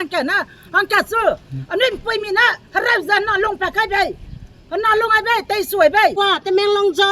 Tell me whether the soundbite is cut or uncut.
cut